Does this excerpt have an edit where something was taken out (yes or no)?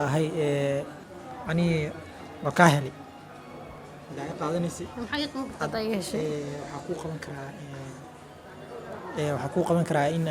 yes